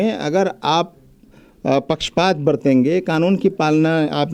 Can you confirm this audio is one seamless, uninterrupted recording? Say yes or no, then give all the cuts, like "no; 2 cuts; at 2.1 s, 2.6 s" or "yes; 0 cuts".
yes; 0 cuts